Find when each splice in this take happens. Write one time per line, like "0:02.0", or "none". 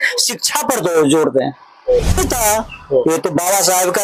0:02.2

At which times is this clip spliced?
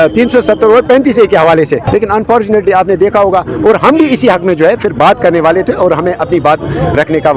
0:01.8

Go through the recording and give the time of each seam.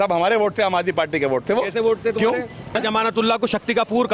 0:02.8

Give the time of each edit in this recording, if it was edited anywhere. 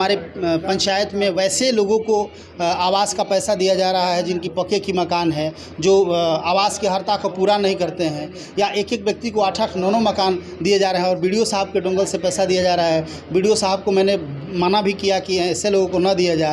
none

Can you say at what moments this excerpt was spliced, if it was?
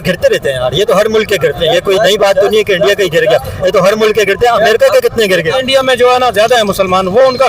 0:05.5

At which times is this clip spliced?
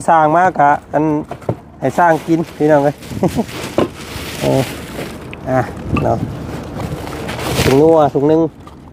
none

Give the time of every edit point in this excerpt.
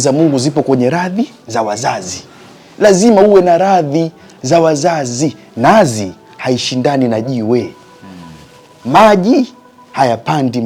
none

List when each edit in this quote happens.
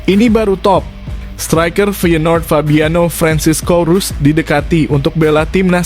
none

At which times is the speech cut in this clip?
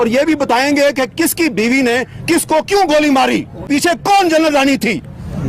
0:03.7

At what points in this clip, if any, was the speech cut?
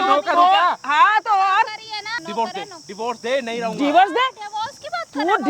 0:02.2

